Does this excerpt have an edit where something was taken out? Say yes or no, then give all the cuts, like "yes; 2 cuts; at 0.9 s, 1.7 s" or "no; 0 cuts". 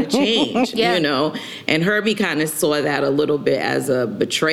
no; 0 cuts